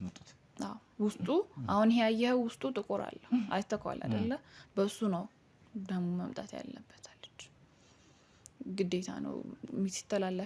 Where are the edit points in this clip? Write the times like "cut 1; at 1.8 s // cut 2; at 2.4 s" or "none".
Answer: none